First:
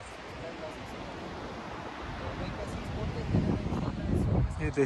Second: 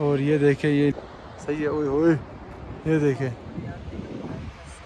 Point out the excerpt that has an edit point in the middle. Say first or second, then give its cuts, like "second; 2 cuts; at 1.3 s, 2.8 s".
second; 1 cut; at 0.9 s